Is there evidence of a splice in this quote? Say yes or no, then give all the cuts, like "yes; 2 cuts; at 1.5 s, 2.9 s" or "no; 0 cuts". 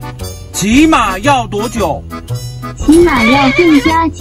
no; 0 cuts